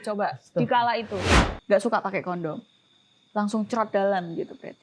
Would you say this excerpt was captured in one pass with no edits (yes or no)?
no